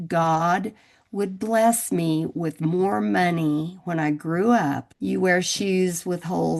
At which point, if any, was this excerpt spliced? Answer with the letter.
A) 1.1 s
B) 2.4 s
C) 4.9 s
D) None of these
C